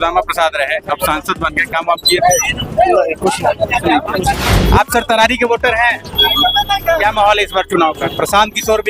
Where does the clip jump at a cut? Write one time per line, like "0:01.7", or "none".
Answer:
0:04.5